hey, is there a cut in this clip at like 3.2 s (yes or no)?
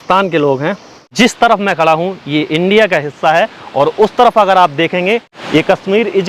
no